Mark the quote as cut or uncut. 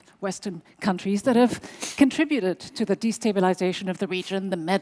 uncut